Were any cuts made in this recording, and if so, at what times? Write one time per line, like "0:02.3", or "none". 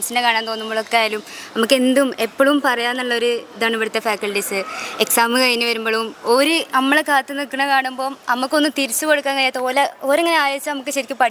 none